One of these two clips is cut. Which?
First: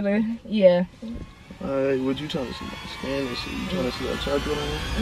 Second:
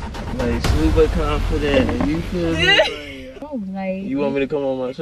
second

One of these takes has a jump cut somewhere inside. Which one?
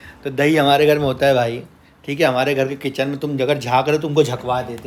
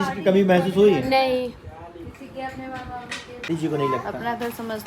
second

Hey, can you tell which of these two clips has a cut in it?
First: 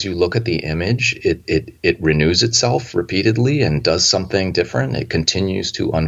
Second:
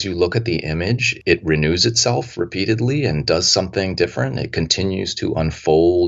second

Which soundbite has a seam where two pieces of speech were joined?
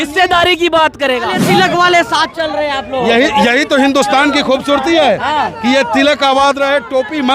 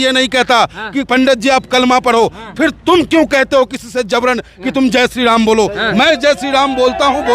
first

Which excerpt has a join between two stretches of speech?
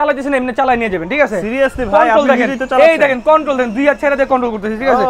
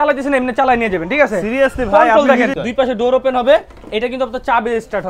second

